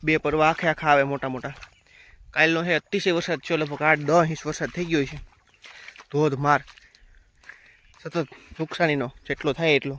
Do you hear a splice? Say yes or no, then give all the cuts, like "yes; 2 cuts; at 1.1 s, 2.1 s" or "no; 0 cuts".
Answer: no; 0 cuts